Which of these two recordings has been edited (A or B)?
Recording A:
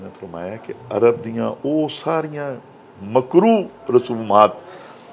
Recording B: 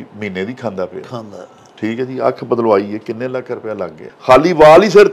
B